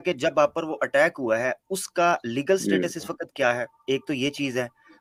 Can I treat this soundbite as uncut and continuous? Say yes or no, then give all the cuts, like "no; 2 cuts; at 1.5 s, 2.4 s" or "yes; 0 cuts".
yes; 0 cuts